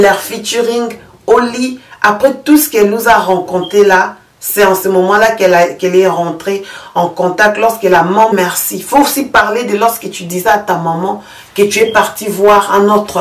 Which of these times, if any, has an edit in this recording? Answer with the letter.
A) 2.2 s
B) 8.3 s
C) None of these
B